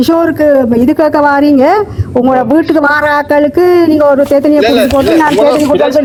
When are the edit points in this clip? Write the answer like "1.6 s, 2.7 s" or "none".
none